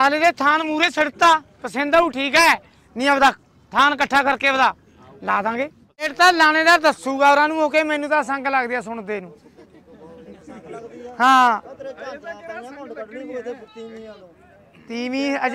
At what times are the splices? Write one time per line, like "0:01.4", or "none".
0:06.1